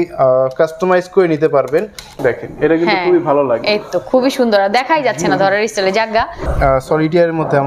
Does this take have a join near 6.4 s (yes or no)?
yes